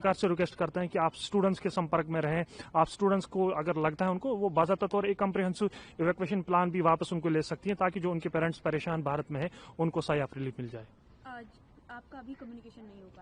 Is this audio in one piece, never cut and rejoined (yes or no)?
yes